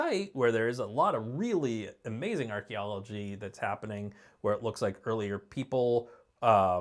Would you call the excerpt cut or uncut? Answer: uncut